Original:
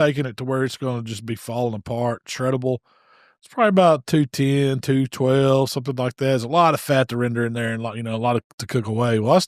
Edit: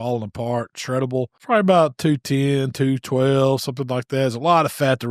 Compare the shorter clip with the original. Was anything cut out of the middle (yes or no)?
yes